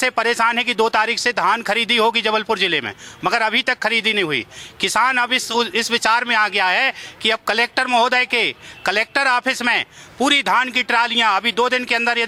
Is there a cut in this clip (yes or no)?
no